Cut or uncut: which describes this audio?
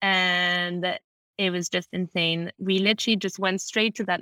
uncut